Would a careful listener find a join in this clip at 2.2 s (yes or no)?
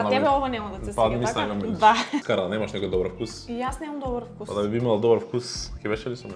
yes